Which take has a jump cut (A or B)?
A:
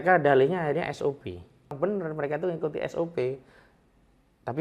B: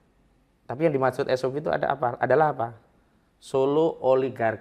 A